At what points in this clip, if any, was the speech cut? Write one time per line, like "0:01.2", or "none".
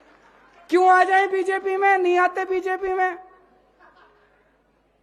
none